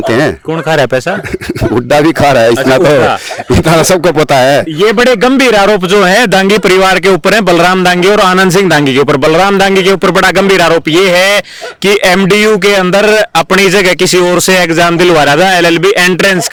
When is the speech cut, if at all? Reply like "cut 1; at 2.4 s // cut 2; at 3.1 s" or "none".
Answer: none